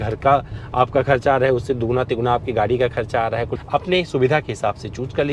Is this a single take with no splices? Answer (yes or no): no